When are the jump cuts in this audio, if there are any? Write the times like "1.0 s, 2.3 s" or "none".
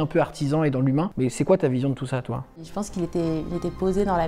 1.1 s, 2.6 s